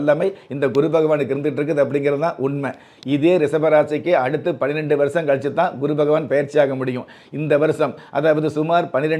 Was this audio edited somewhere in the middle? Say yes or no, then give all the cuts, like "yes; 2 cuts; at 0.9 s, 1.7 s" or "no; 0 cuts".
no; 0 cuts